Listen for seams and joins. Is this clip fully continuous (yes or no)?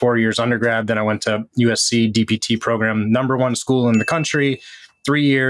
yes